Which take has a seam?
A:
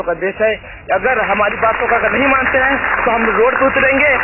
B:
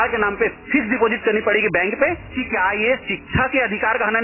B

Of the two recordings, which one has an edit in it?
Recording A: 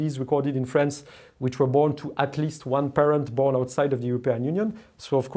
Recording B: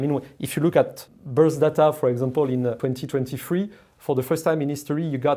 B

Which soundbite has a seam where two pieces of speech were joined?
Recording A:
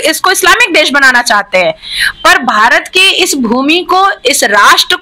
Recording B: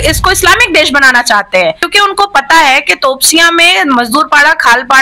B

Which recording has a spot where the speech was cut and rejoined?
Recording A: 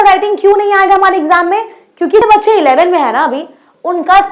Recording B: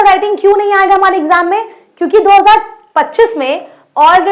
A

